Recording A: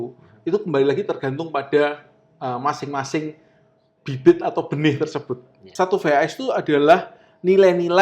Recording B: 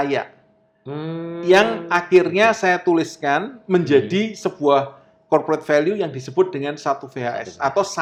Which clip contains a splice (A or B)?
A